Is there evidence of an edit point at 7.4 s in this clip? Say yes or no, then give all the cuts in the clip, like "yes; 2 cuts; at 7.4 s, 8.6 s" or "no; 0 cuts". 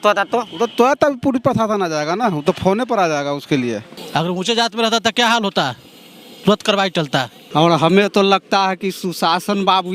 yes; 2 cuts; at 3.9 s, 7.4 s